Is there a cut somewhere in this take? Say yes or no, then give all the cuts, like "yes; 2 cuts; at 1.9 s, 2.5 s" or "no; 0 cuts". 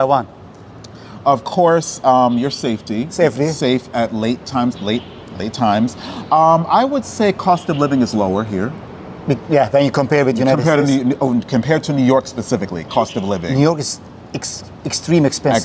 no; 0 cuts